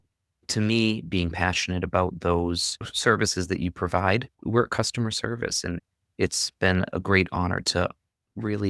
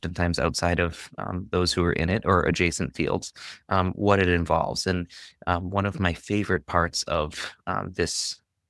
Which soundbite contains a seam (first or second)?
first